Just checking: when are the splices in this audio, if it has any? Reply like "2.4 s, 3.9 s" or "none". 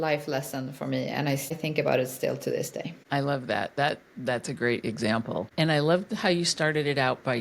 1.6 s, 3.0 s, 5.5 s